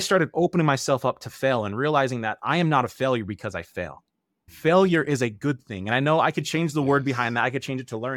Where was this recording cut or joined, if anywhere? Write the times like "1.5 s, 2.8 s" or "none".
none